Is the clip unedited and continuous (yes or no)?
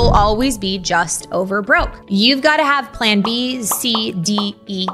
yes